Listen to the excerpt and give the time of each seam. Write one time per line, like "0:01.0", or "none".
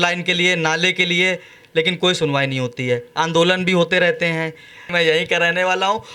0:04.8

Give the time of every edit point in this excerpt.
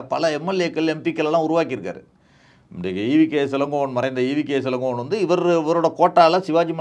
none

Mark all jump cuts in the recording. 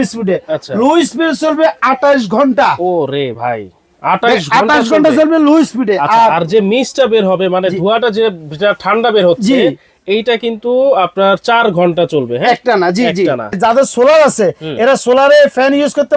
0:13.5

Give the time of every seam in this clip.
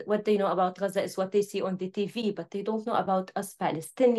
none

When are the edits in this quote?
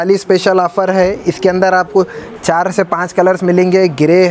none

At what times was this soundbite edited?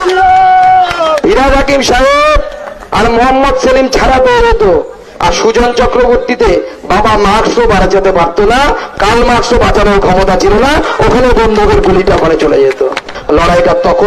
0:13.1

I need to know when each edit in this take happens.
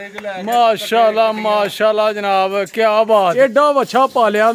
0:03.3

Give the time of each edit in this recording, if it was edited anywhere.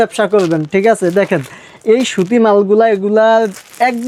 none

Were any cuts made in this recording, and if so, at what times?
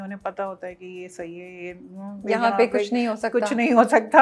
none

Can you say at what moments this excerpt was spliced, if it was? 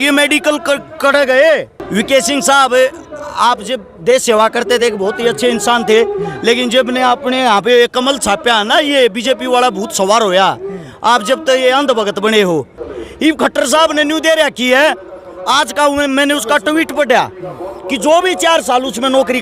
0:01.8
0:12.8

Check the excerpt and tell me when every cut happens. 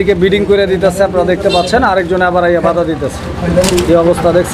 none

